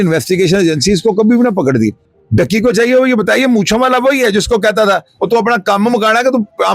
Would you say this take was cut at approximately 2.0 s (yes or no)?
yes